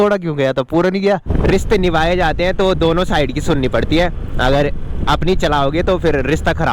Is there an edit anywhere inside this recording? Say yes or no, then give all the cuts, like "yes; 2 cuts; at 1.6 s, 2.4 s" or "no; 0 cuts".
yes; 1 cut; at 1.3 s